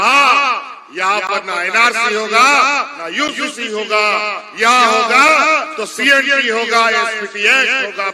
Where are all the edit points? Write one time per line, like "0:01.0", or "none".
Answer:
none